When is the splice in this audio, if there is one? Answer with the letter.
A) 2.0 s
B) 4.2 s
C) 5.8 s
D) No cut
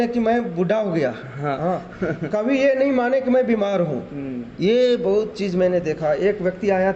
D